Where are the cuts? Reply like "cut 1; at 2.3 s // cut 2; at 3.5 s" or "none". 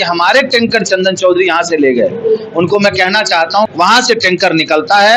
cut 1; at 3.7 s